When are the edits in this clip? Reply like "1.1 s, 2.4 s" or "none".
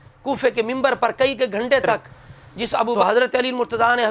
3.0 s

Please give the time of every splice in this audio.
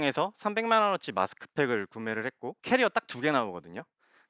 2.5 s

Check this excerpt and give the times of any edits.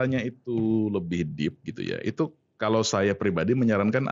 none

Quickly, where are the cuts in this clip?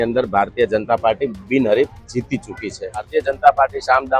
3.1 s

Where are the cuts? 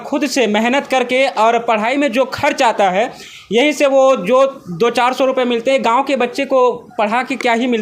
none

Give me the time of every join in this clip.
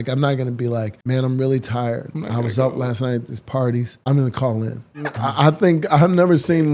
1.0 s, 2.1 s, 3.9 s, 5.2 s

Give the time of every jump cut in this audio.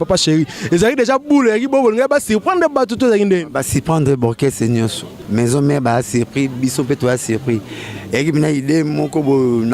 5.1 s

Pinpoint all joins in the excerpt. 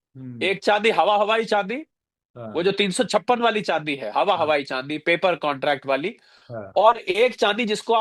none

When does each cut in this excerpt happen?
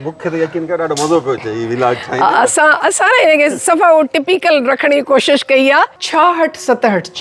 6.0 s

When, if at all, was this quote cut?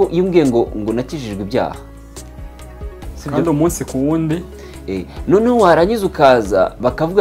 none

